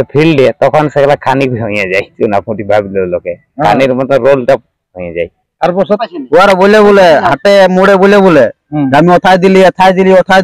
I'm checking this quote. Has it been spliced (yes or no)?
yes